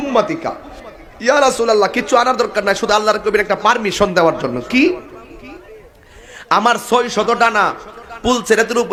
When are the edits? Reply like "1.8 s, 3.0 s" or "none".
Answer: none